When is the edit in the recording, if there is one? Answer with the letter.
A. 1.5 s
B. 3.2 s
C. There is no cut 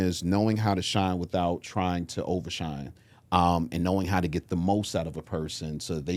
C